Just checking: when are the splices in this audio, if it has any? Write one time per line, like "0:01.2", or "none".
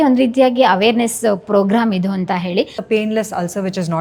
0:02.7